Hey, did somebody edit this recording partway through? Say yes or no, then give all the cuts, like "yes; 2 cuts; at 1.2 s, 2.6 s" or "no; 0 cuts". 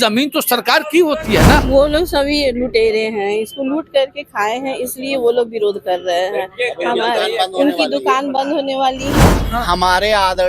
yes; 2 cuts; at 1.6 s, 9.4 s